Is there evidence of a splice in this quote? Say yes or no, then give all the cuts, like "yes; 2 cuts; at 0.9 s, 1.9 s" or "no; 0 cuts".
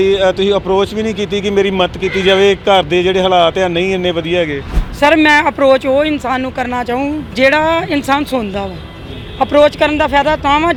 no; 0 cuts